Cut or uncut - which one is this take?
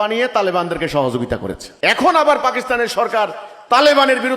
cut